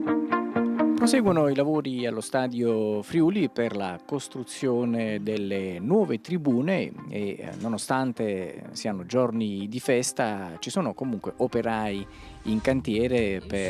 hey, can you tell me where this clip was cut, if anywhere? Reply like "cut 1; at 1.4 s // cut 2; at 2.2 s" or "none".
none